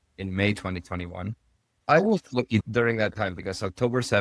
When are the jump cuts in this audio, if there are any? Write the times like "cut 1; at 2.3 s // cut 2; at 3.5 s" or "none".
none